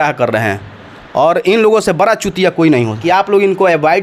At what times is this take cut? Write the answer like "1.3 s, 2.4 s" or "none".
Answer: 3.0 s